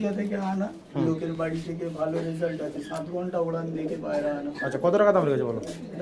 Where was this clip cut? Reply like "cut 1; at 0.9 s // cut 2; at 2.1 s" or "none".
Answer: none